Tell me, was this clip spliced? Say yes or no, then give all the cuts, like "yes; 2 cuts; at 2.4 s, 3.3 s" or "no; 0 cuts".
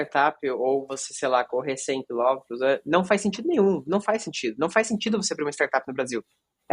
no; 0 cuts